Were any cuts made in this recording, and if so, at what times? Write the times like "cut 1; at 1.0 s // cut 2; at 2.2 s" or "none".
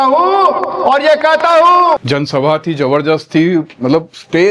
cut 1; at 2.0 s

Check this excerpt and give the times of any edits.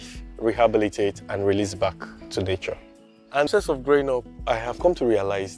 cut 1; at 3.5 s

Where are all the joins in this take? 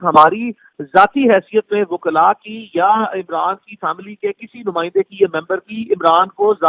none

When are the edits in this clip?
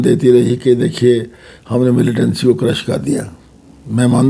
none

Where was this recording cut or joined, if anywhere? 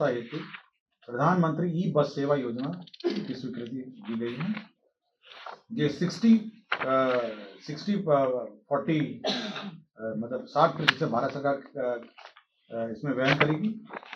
none

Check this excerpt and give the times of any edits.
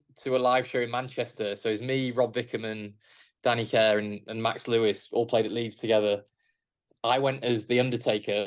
none

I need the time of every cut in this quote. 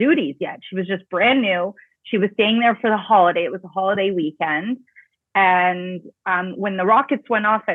none

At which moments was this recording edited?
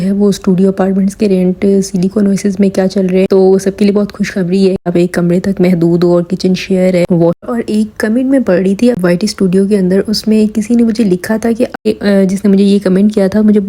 cut 1; at 4.8 s // cut 2; at 7.4 s // cut 3; at 11.8 s

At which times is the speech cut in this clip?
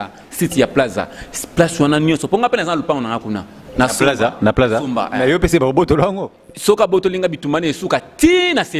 none

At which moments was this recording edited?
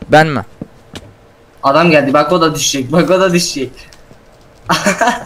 none

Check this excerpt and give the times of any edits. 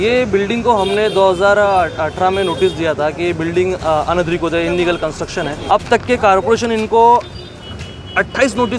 cut 1; at 5.6 s

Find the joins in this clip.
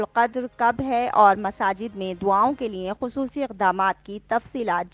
none

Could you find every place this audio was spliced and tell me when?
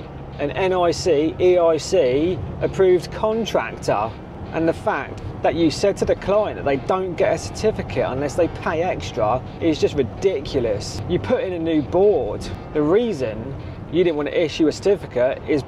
cut 1; at 9.5 s // cut 2; at 10.9 s // cut 3; at 12.5 s

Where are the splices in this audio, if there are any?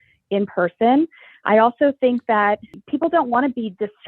cut 1; at 2.7 s

